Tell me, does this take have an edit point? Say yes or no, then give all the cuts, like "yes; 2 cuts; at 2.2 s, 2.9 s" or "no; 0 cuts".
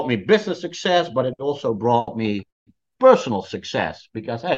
no; 0 cuts